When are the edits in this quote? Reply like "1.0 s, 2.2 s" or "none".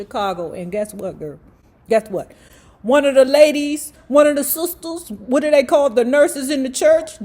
3.9 s